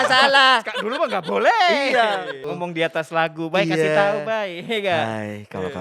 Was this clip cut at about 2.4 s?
yes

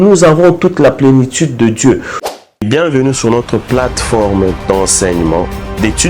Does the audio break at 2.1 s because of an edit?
yes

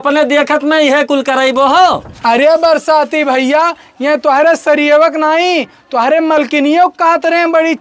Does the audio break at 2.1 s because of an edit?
yes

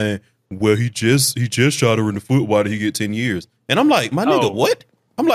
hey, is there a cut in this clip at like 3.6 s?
no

